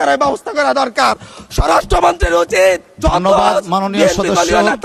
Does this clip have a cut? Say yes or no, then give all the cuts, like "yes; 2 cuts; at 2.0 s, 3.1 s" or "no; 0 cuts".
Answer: no; 0 cuts